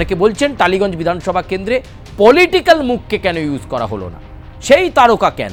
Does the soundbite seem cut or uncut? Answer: uncut